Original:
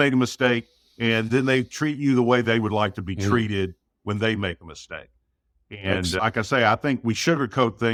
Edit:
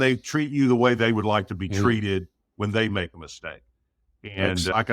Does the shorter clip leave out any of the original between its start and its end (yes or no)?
no